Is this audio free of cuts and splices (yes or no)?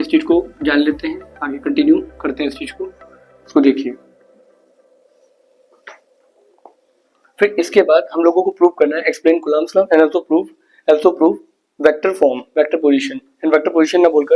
yes